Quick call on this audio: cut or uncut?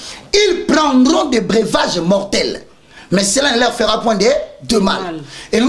uncut